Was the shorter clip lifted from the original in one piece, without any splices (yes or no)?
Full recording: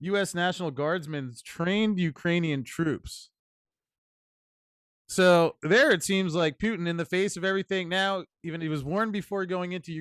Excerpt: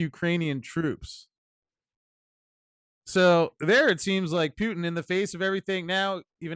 yes